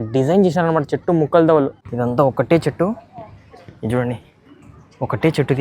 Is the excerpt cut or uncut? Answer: cut